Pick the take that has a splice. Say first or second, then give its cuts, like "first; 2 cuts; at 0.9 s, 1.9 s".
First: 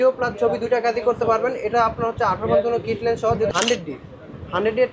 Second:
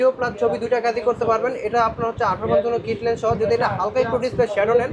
first; 1 cut; at 3.5 s